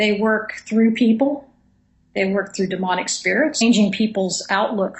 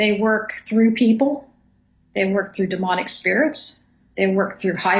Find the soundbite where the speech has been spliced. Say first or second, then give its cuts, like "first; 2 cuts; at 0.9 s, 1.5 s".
second; 1 cut; at 3.6 s